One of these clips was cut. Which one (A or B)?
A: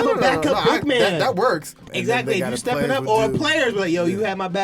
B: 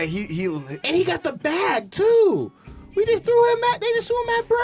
A